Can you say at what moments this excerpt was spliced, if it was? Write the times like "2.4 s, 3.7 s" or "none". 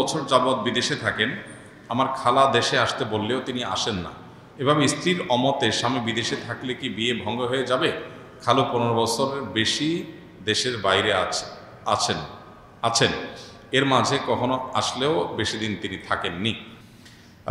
none